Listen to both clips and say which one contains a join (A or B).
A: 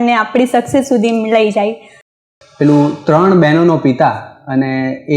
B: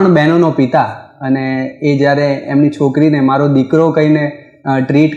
A